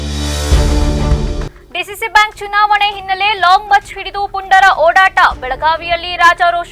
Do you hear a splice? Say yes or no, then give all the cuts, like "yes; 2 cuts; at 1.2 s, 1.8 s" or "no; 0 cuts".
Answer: yes; 1 cut; at 1.5 s